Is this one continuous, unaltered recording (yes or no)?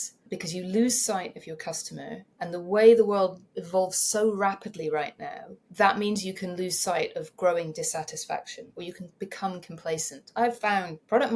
yes